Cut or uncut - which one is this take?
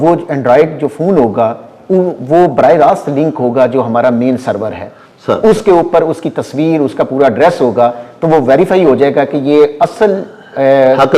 uncut